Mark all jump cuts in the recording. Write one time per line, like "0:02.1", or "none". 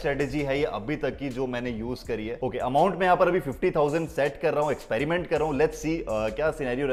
none